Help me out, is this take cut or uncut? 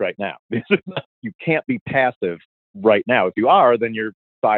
cut